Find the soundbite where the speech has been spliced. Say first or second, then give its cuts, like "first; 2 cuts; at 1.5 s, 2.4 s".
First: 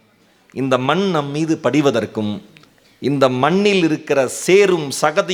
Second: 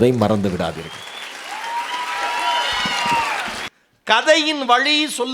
second; 1 cut; at 3.4 s